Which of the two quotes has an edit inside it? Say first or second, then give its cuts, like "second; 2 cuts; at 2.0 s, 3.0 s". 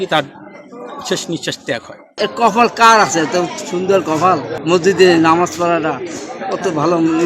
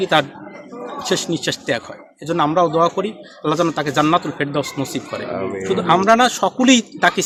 first; 2 cuts; at 2.0 s, 4.5 s